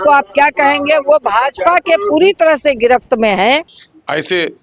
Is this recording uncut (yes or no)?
no